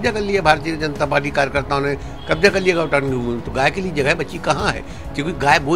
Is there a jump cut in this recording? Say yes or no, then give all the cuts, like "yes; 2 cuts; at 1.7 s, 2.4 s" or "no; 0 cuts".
no; 0 cuts